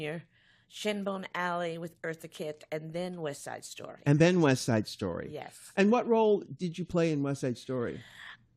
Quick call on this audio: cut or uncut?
cut